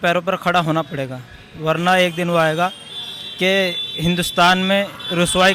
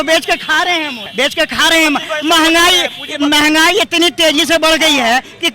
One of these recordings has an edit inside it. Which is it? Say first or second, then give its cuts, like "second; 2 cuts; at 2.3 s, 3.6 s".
second; 1 cut; at 1.0 s